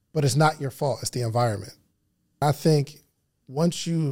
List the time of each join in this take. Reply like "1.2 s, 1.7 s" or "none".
2.4 s

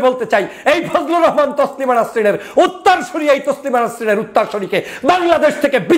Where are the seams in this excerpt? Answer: none

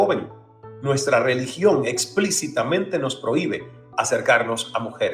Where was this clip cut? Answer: none

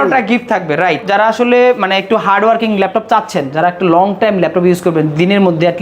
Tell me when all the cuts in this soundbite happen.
1.1 s

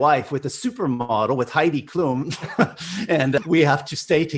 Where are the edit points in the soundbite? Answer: none

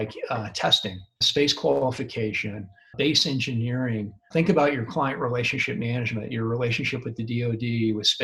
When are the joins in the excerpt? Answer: 1.2 s, 2.8 s, 4.2 s

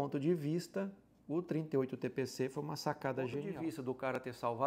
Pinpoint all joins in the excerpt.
3.4 s

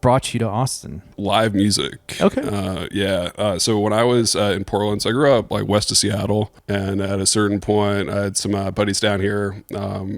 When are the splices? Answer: 1.1 s, 6.6 s

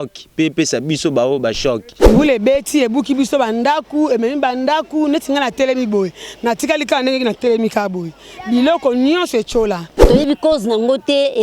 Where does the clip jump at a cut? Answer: 1.9 s, 10.0 s

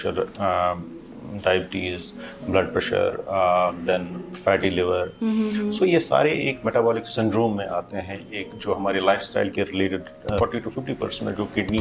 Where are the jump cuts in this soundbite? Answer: 10.4 s

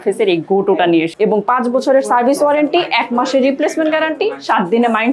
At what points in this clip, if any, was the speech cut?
1.1 s

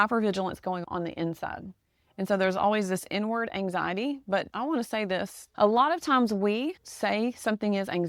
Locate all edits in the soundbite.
none

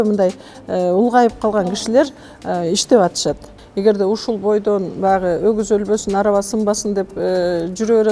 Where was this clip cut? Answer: 3.5 s

